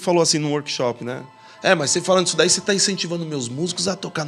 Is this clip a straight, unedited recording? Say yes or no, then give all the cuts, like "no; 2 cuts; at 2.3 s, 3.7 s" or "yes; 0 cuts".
yes; 0 cuts